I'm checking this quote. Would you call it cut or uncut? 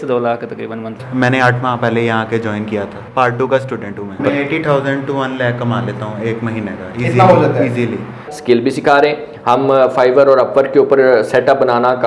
cut